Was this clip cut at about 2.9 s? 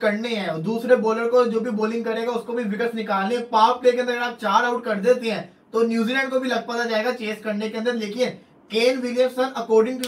no; 0 cuts

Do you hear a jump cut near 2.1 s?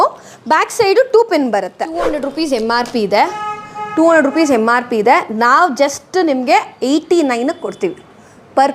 yes; 1 cut; at 2.1 s

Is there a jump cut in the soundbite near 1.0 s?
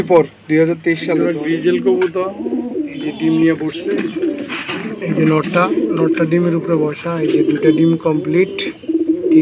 yes; 1 cut; at 1.0 s

